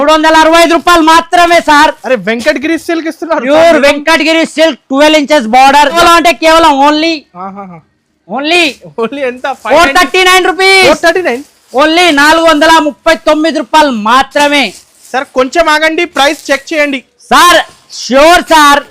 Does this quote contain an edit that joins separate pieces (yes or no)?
yes